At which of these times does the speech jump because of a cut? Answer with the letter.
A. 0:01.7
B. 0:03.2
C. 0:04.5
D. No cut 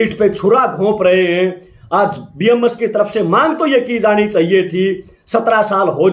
D